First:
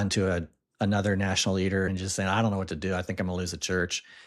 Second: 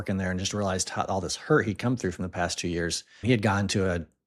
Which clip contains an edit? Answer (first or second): first